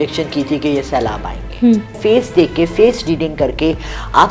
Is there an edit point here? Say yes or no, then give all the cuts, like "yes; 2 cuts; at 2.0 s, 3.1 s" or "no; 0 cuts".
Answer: yes; 1 cut; at 2.0 s